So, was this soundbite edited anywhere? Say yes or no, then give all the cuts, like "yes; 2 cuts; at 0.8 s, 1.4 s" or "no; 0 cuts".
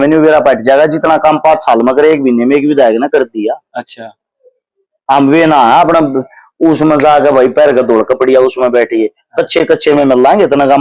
no; 0 cuts